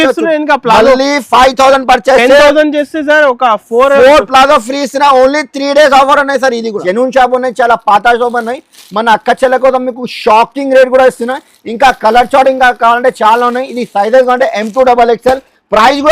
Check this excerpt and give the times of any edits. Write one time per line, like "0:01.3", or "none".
0:06.8